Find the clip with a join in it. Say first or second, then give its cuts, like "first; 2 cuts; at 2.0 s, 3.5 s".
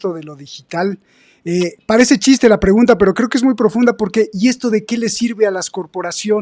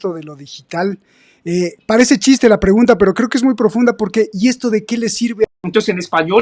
second; 1 cut; at 5.5 s